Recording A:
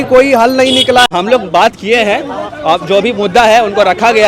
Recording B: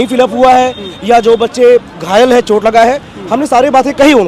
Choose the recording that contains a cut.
A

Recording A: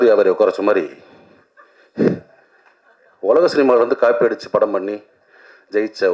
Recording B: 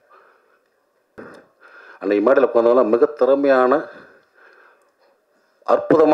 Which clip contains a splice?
B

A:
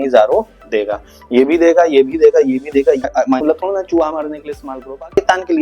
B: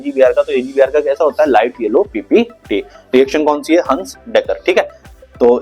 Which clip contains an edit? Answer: A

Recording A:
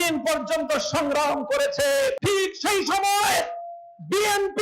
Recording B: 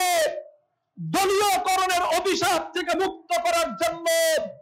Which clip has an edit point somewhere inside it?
A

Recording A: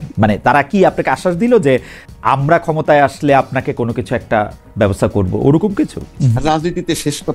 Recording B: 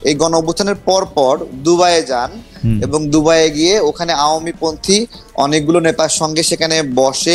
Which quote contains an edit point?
A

